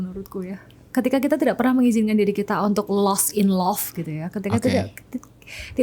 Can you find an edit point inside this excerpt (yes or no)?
no